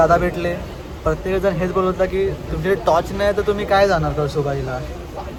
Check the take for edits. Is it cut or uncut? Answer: uncut